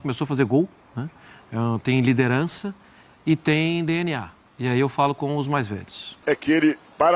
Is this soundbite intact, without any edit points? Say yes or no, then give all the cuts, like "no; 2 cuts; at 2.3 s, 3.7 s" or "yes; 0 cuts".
no; 1 cut; at 6.2 s